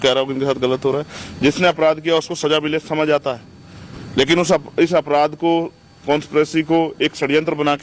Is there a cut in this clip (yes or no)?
no